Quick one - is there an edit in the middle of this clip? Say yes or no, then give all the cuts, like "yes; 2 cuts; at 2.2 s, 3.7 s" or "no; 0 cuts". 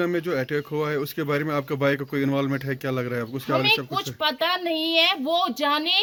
no; 0 cuts